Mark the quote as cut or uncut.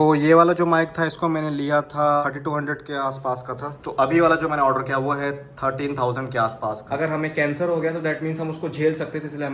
cut